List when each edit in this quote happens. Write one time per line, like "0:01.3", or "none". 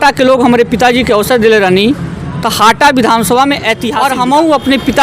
0:03.9